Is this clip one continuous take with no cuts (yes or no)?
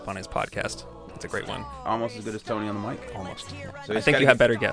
no